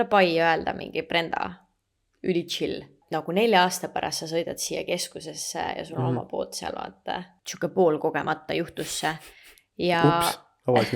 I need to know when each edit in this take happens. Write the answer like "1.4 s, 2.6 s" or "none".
3.0 s, 7.4 s